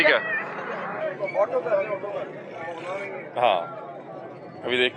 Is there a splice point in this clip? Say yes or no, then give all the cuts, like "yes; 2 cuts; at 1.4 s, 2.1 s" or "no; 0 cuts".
no; 0 cuts